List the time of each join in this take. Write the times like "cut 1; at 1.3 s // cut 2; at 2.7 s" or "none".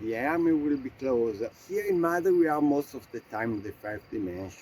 cut 1; at 1.5 s